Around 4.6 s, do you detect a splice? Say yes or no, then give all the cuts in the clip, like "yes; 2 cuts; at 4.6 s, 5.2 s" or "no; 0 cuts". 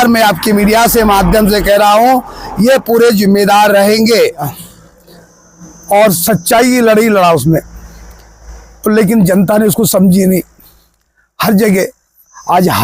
yes; 1 cut; at 4.6 s